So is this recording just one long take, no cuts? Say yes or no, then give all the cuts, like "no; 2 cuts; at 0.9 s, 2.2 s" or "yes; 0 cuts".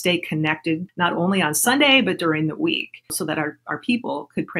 no; 2 cuts; at 0.9 s, 3.2 s